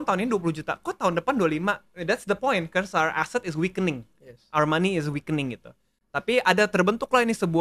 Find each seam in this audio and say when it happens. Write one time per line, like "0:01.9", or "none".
none